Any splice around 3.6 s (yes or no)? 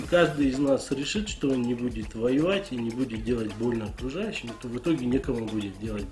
no